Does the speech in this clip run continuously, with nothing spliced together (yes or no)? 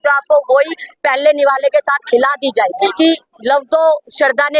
no